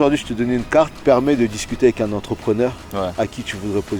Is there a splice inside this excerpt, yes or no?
yes